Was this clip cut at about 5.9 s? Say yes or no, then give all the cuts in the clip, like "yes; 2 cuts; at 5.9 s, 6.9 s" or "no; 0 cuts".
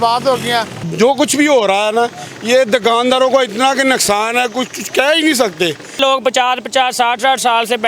yes; 2 cuts; at 0.9 s, 5.9 s